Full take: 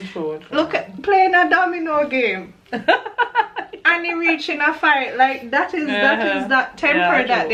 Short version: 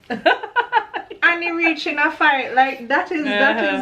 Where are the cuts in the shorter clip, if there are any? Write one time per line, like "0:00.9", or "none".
none